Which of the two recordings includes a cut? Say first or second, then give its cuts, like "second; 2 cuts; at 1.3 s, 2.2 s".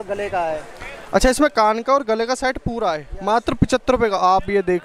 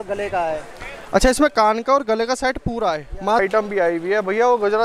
second; 1 cut; at 3.4 s